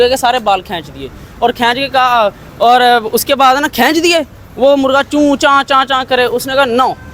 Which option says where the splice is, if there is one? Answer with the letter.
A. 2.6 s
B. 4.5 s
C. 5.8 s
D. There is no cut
D